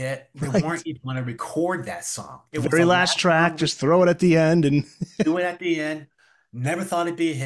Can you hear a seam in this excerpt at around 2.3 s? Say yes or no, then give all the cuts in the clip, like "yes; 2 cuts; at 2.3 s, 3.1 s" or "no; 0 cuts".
no; 0 cuts